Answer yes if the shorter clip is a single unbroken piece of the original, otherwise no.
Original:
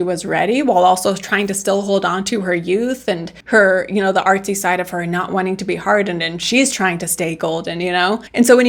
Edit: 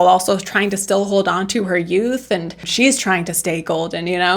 no